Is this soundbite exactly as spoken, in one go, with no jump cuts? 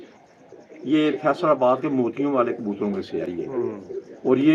yes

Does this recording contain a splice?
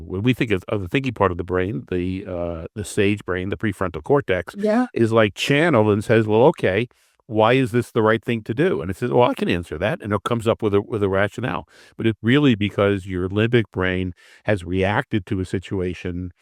no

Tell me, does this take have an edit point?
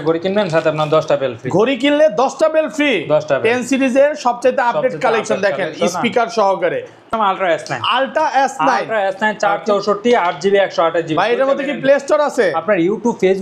yes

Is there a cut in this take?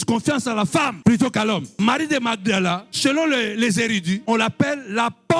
yes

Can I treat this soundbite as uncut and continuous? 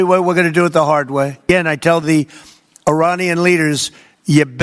no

